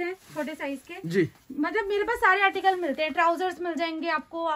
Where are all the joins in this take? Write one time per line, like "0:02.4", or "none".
none